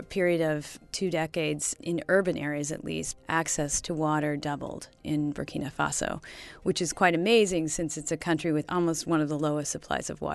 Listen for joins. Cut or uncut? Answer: cut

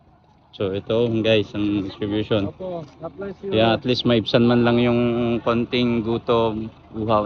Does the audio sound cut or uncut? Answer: uncut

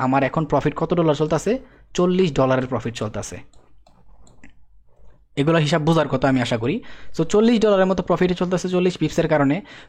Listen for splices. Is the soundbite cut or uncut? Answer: uncut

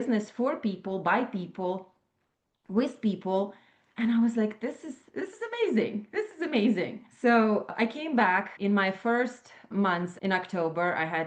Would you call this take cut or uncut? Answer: cut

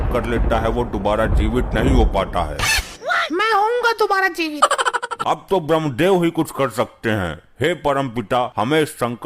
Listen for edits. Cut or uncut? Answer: cut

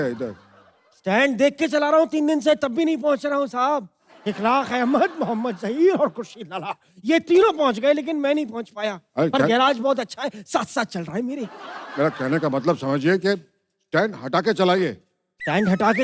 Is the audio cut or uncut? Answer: uncut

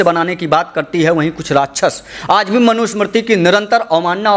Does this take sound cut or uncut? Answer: uncut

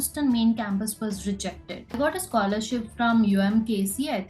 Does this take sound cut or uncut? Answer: cut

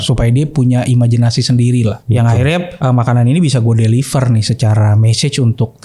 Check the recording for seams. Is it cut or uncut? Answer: cut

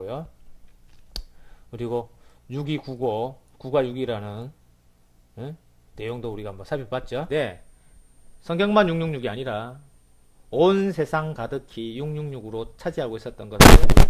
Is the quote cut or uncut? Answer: uncut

